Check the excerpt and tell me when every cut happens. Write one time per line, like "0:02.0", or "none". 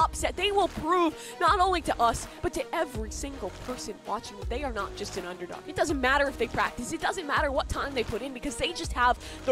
none